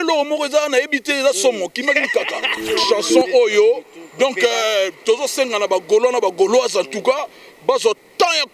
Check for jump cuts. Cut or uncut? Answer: cut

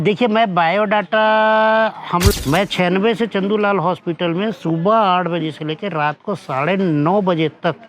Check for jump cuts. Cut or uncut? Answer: cut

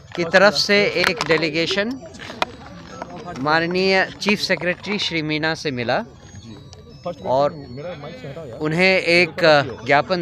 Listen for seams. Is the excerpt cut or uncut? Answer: uncut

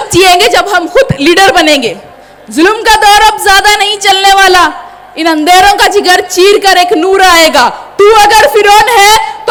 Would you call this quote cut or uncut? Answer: uncut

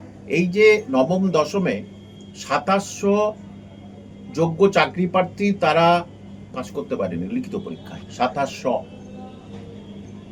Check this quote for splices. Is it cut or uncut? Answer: uncut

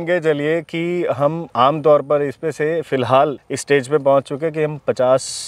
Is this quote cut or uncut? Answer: cut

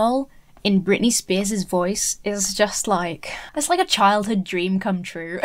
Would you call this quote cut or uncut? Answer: uncut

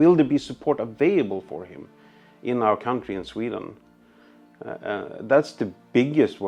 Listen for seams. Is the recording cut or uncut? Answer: uncut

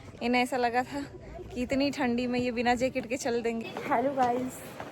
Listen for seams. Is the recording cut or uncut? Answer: cut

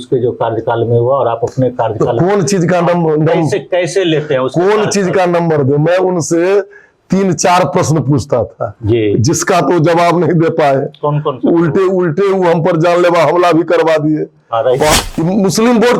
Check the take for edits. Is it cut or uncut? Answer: cut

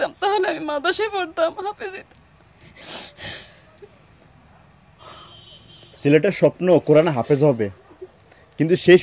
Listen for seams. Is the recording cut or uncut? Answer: uncut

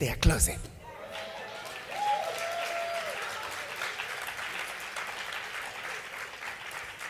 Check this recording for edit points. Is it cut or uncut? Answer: uncut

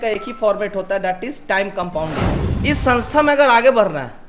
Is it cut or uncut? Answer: cut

